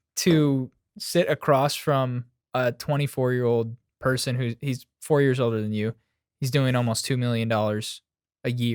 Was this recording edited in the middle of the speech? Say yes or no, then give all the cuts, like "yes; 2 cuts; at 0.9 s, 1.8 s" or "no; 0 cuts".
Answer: no; 0 cuts